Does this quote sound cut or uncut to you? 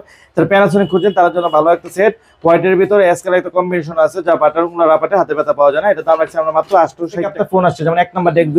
cut